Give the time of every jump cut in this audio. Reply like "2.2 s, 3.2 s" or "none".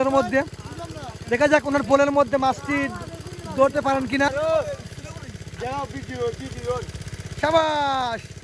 4.3 s